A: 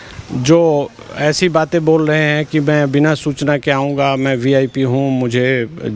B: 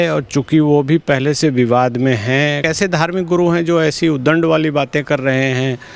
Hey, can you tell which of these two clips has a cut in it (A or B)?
B